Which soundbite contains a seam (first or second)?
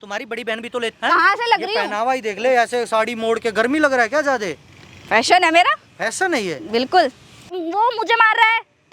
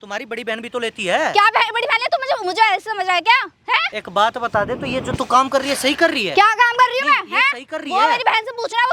first